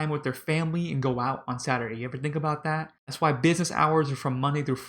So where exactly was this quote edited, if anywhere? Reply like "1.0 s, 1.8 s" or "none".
3.0 s